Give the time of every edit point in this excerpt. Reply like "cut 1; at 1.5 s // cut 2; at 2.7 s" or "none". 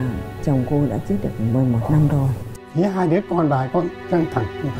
cut 1; at 2.4 s